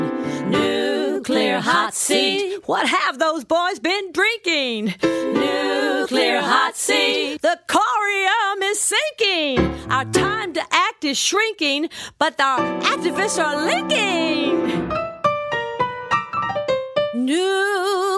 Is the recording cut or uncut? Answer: uncut